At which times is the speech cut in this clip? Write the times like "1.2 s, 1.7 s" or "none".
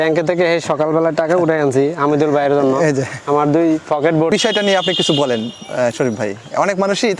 4.3 s

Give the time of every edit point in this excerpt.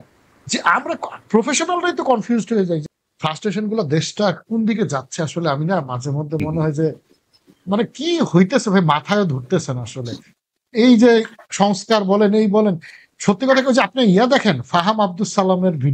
2.8 s

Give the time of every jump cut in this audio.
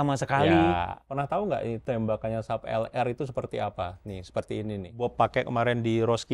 1.0 s, 1.8 s, 5.0 s

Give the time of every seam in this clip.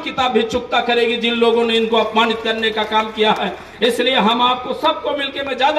none

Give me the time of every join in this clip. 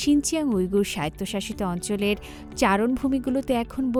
none

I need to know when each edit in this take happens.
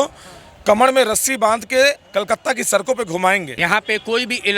3.5 s

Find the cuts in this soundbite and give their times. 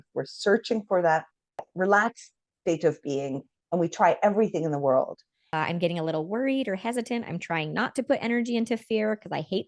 1.7 s, 5.5 s

